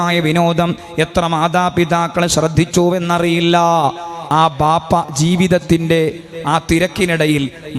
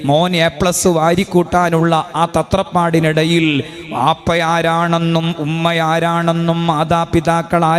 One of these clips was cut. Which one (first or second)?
first